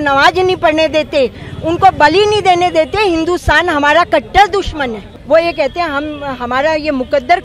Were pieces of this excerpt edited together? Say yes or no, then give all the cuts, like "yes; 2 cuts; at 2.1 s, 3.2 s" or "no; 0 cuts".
yes; 1 cut; at 5.1 s